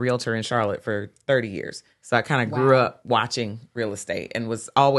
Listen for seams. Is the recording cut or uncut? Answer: uncut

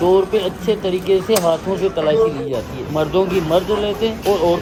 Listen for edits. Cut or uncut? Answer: uncut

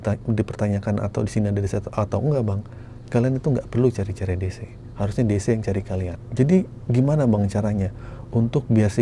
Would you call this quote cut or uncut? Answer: cut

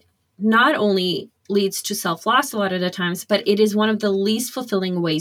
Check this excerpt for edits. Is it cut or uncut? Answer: uncut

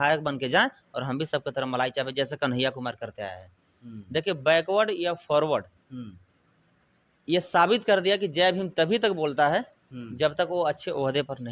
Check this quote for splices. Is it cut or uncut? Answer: uncut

